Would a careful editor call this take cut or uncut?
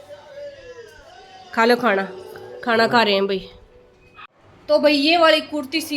cut